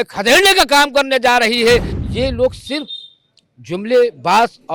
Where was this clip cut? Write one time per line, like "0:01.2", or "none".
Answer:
0:02.0